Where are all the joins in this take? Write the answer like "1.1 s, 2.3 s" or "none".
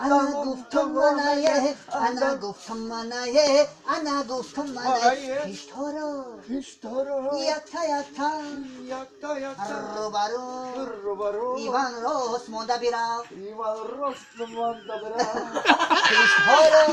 5.6 s